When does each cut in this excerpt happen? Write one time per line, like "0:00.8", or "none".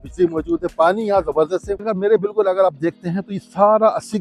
0:01.9